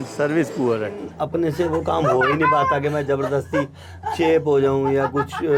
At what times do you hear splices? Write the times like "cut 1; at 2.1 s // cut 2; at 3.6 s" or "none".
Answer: cut 1; at 1.1 s